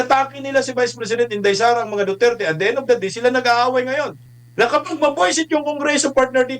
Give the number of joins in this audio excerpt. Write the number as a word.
one